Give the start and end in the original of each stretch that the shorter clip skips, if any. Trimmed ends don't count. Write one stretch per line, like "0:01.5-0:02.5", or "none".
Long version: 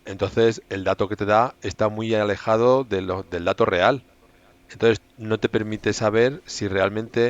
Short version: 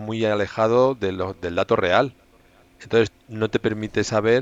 none